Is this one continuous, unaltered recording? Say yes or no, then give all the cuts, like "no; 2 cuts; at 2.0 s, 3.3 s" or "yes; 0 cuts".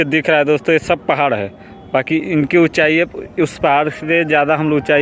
yes; 0 cuts